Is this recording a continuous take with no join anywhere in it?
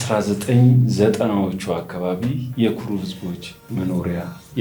no; 1 cut; at 2.4 s

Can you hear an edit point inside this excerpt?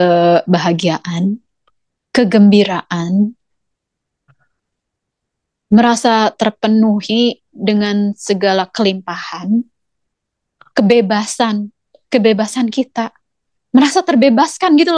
no; 0 cuts

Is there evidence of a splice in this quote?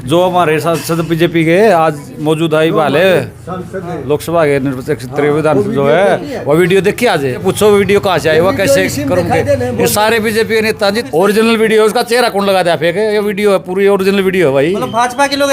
yes; 2 cuts; at 7.4 s, 11.0 s

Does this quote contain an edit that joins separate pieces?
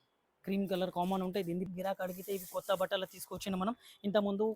yes; 1 cut; at 1.7 s

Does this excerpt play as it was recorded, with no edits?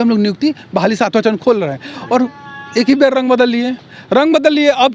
yes; 0 cuts

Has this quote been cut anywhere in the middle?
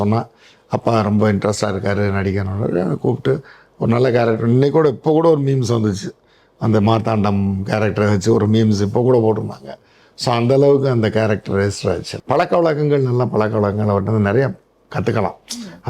yes; 1 cut; at 12.1 s

